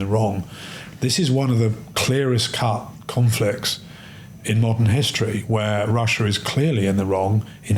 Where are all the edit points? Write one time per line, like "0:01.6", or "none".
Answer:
none